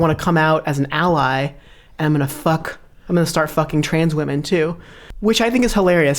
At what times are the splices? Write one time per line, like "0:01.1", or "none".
0:05.0